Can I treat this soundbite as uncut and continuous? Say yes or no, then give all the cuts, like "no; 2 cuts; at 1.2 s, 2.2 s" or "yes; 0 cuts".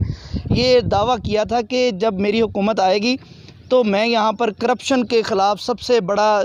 yes; 0 cuts